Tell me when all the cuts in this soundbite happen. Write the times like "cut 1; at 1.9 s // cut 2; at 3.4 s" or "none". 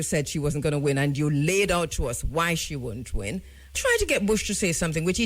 cut 1; at 3.8 s